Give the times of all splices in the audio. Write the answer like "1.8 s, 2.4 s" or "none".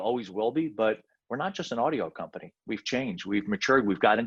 none